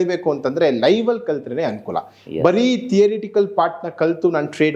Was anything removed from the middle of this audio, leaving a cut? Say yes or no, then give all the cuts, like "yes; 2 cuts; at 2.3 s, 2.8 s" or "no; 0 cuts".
no; 0 cuts